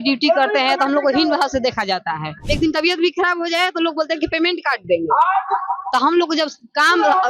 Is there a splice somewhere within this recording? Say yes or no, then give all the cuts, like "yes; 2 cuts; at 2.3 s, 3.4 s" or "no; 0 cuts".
yes; 1 cut; at 2.4 s